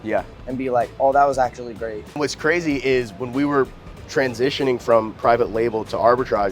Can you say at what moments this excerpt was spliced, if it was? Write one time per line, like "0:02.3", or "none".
0:02.1